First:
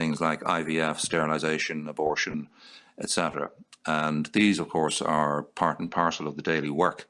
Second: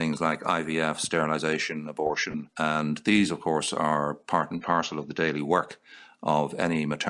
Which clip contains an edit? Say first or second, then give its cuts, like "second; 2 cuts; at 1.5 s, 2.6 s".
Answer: second; 1 cut; at 2.5 s